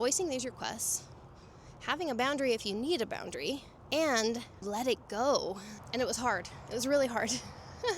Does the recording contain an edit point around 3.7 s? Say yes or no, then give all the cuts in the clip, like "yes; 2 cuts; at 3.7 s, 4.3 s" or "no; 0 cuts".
yes; 3 cuts; at 3.7 s, 4.6 s, 5.7 s